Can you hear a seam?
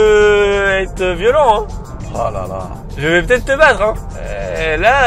yes; 1 cut; at 4.1 s

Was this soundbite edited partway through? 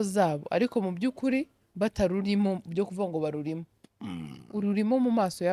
no; 0 cuts

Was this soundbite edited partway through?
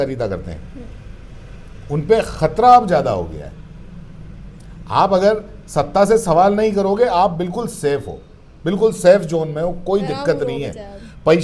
no; 0 cuts

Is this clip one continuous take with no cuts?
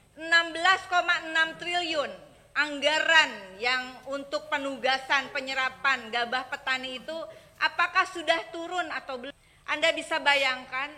no; 1 cut; at 9.3 s

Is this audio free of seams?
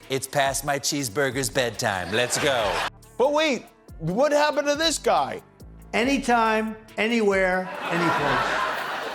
no; 1 cut; at 2.9 s

